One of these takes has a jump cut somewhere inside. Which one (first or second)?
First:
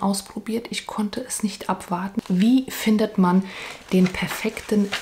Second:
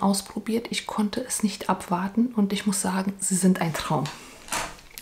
first